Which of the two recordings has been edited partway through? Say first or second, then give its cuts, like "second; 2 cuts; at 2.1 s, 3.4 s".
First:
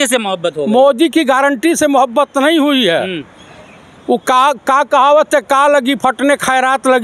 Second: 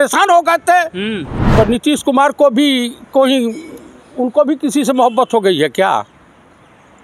second; 1 cut; at 1.4 s